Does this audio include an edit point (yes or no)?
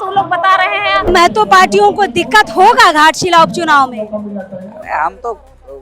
yes